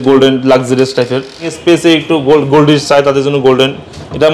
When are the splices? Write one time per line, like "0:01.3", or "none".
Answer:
0:01.5